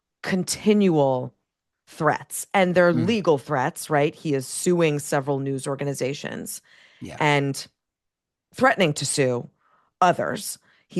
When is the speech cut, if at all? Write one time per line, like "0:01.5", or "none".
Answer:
none

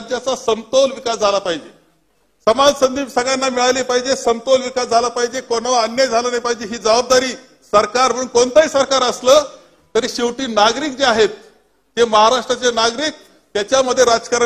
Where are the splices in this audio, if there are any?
none

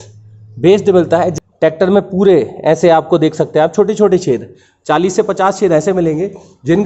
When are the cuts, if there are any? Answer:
0:01.3

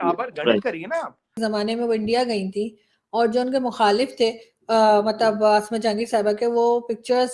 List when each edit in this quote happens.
0:01.2

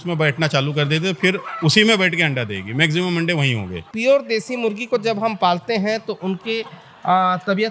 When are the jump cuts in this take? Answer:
0:03.9

